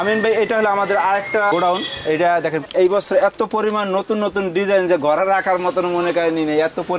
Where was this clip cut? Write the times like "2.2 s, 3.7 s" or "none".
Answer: 2.6 s